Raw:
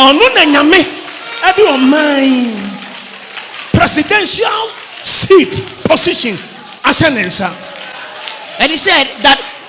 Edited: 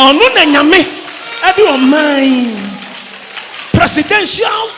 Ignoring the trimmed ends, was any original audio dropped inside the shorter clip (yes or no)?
no